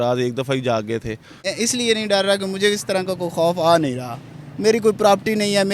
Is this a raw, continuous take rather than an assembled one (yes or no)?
no